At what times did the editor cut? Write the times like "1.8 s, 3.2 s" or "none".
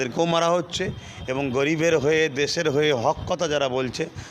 none